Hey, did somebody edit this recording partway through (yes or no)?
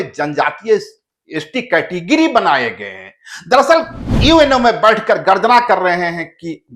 yes